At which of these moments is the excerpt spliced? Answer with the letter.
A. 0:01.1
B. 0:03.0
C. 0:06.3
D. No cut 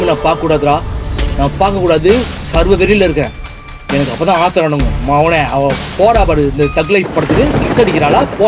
D